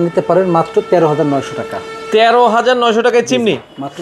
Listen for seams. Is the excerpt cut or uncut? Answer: uncut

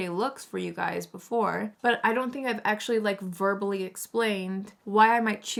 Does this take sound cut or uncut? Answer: uncut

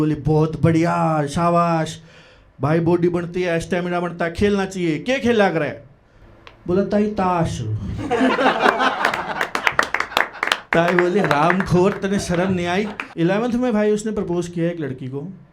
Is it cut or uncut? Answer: cut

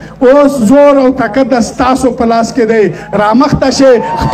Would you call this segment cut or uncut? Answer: uncut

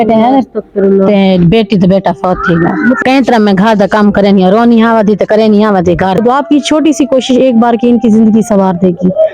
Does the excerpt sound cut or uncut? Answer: cut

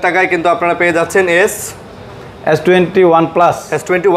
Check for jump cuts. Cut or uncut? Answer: uncut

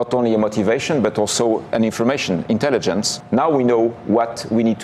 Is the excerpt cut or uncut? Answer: cut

